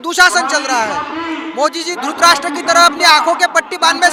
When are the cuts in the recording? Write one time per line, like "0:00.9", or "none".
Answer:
none